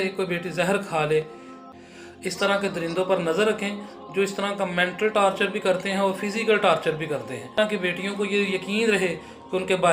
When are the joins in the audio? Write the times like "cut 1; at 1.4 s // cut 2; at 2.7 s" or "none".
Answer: cut 1; at 1.5 s // cut 2; at 7.6 s